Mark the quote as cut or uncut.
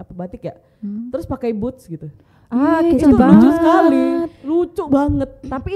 uncut